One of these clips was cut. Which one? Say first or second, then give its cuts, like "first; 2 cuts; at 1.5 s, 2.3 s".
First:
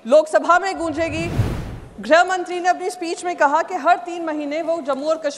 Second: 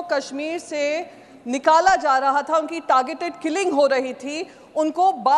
first; 1 cut; at 1.4 s